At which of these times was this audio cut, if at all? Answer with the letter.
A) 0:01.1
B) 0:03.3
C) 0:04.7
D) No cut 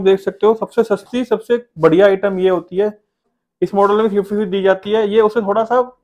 B